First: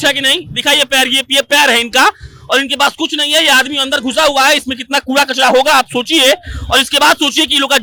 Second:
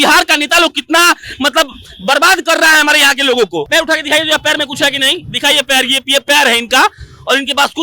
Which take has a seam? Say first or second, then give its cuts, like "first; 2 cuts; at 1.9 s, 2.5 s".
second; 1 cut; at 3.7 s